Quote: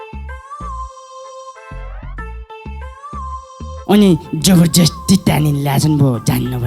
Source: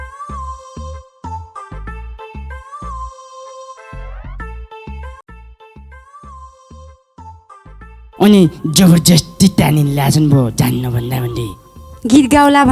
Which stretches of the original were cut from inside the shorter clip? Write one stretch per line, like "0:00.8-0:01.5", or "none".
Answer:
0:05.4-0:07.5